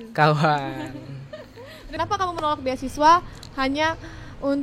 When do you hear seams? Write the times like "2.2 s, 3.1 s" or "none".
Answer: 1.8 s